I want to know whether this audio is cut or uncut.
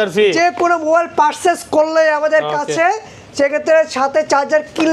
uncut